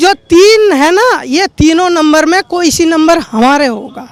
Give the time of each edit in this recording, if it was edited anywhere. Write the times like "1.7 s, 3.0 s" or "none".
none